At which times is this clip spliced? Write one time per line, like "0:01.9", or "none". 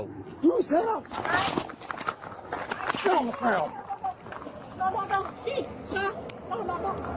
0:03.6